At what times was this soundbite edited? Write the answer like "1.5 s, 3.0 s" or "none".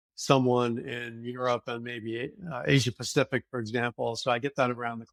none